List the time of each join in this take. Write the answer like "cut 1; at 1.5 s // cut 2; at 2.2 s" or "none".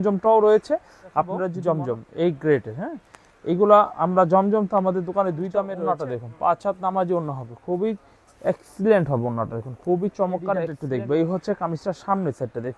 cut 1; at 1.5 s // cut 2; at 5.8 s // cut 3; at 10.8 s